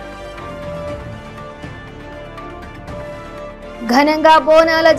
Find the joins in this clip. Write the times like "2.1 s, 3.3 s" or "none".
2.0 s